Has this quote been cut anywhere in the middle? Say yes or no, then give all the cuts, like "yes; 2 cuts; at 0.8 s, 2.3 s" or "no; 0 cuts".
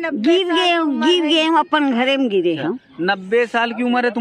no; 0 cuts